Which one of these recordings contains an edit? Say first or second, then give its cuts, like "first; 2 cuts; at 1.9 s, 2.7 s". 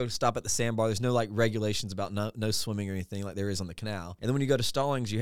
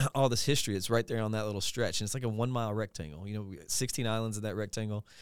first; 1 cut; at 4.1 s